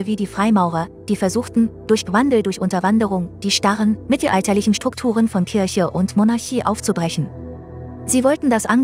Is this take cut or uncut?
uncut